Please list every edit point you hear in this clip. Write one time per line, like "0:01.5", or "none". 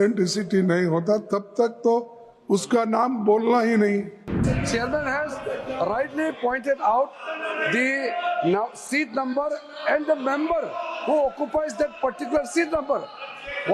0:04.5